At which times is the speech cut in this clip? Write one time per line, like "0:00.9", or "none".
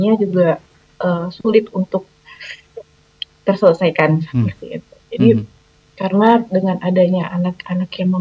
none